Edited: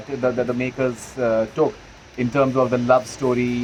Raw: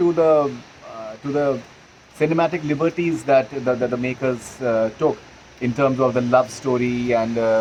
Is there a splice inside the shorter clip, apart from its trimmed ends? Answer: no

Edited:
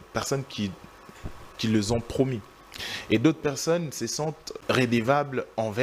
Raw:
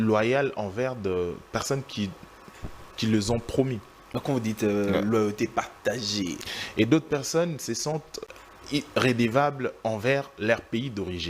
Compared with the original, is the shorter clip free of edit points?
no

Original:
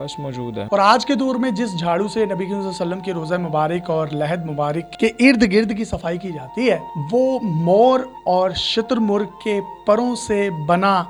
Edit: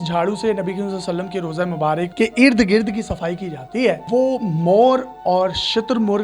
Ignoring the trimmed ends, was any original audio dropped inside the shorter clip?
yes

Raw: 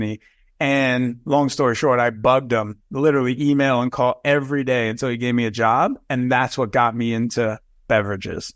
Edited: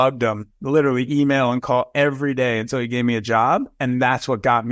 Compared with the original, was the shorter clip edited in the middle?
no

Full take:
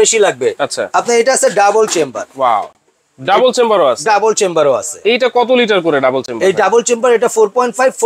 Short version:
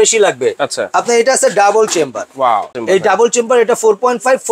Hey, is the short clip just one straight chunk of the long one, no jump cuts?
no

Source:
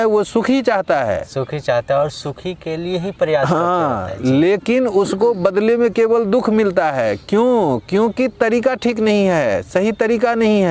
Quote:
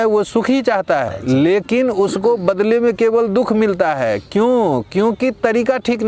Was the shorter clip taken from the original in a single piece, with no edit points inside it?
no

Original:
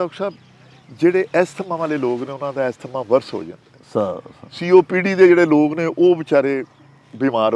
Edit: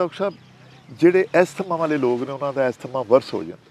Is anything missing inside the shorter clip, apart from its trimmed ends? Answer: no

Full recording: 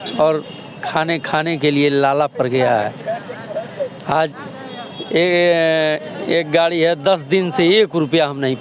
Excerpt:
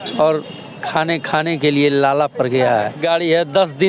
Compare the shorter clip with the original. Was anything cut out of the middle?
yes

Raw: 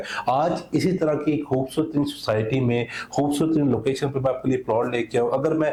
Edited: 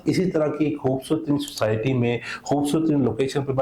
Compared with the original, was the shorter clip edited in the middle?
no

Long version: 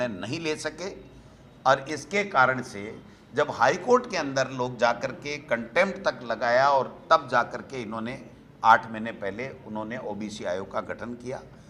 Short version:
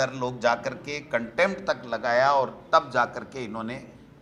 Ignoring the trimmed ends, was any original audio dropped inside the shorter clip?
no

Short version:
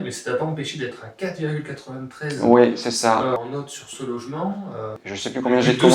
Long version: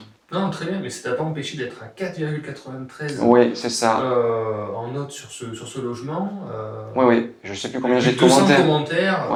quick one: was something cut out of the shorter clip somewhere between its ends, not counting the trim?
yes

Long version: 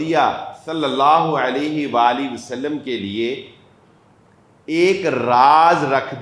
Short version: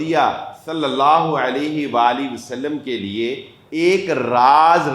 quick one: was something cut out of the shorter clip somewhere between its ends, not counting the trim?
yes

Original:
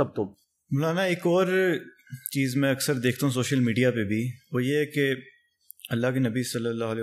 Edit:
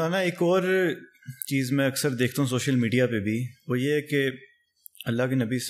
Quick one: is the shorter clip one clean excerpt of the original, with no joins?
yes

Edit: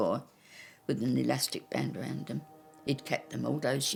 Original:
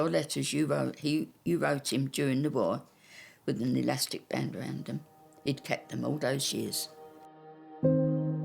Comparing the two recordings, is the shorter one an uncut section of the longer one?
yes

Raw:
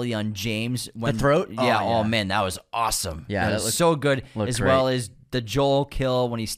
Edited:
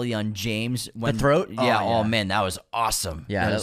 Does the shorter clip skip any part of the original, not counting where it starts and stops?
no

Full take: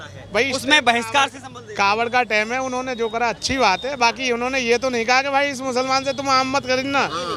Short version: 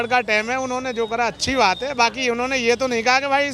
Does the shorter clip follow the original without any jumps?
yes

